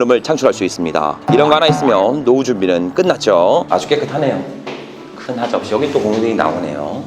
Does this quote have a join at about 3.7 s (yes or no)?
yes